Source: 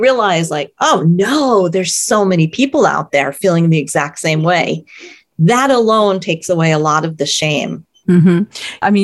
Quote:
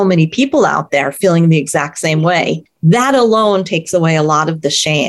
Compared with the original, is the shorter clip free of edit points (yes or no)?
no